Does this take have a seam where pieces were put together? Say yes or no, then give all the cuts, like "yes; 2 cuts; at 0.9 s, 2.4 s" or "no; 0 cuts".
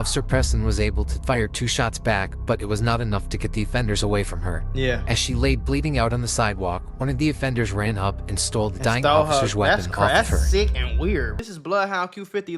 yes; 1 cut; at 11.4 s